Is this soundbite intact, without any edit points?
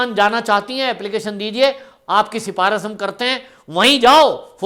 yes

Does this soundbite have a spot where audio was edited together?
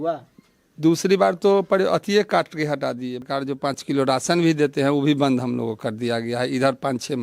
yes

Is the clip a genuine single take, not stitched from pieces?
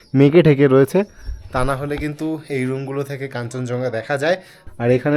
yes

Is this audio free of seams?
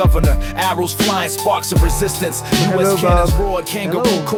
yes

